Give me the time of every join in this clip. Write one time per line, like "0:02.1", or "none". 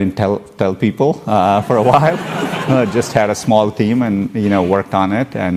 none